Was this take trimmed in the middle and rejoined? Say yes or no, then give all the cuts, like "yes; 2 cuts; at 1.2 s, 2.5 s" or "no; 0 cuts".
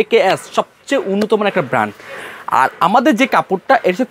no; 0 cuts